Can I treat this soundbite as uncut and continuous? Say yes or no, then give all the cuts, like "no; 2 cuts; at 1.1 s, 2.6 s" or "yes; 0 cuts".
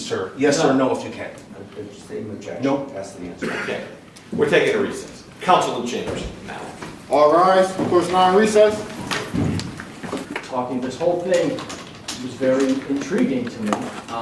no; 1 cut; at 10.2 s